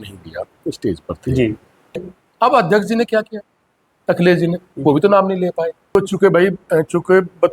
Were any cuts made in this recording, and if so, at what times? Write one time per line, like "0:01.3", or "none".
0:02.0
0:05.9